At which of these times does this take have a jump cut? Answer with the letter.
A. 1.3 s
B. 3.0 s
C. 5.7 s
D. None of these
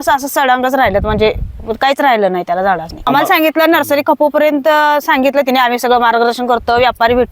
B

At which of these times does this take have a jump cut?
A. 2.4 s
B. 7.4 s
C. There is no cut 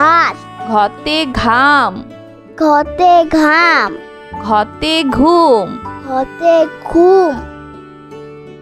B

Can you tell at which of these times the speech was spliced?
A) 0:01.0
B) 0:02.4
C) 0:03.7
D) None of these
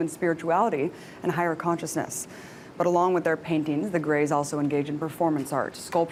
D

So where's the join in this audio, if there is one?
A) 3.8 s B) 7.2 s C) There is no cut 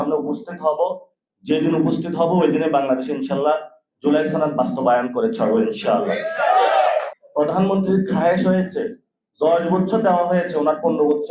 B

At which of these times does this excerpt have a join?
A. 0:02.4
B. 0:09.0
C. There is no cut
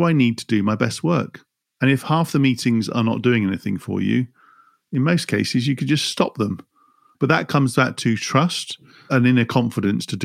B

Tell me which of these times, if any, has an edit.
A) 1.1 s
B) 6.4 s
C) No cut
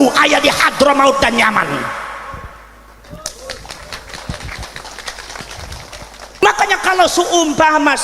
B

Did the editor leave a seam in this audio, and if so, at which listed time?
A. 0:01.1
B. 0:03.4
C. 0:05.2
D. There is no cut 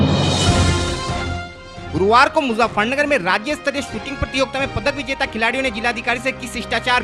A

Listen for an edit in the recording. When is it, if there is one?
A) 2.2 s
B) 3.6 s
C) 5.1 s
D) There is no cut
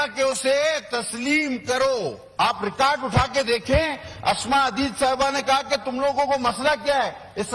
A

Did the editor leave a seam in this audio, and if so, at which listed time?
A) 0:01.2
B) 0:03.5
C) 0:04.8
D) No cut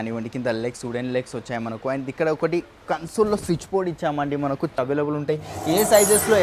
C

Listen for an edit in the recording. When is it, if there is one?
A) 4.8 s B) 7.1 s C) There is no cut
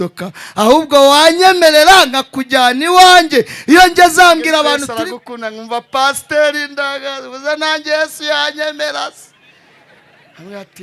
A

